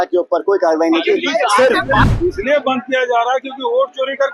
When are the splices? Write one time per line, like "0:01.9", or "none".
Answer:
0:02.0